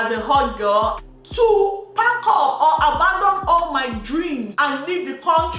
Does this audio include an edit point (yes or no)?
yes